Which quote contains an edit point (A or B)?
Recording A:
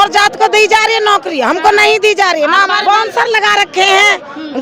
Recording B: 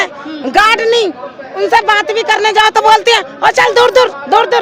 A